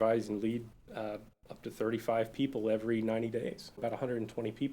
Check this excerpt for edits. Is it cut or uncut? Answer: cut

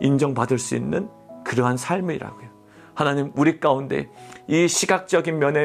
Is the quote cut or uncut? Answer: uncut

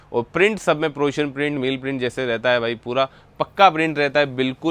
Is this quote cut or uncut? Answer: uncut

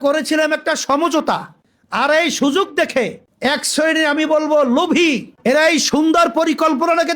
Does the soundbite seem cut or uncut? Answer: uncut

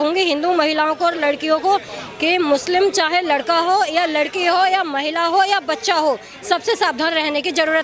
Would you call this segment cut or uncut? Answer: uncut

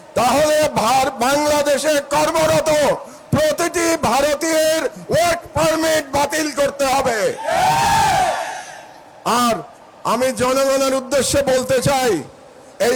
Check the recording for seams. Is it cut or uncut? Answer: uncut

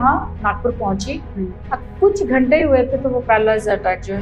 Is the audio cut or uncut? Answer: uncut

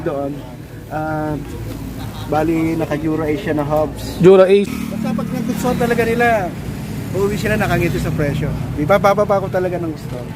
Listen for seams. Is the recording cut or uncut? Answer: cut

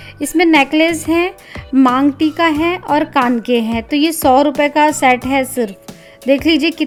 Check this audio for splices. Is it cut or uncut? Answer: uncut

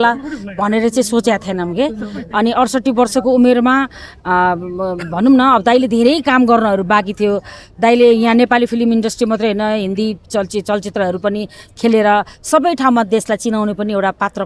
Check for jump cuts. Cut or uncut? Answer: uncut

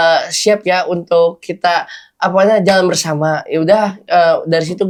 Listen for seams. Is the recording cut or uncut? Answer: uncut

